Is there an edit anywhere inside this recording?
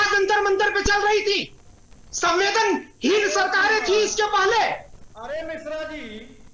no; 0 cuts

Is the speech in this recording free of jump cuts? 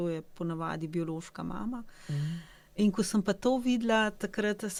yes; 0 cuts

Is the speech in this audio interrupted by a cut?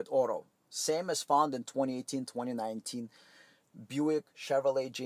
no; 0 cuts

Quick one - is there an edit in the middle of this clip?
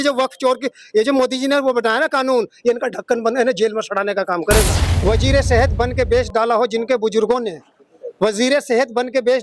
yes; 1 cut; at 4.9 s

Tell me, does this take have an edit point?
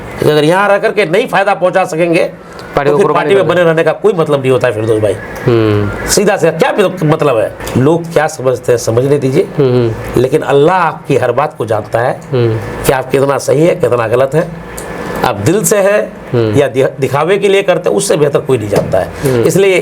no; 0 cuts

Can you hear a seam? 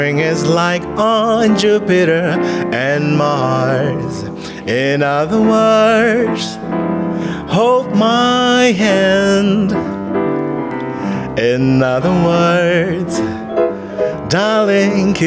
no; 0 cuts

